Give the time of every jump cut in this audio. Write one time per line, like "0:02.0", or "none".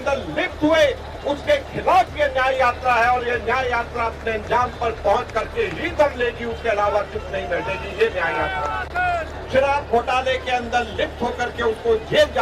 0:09.4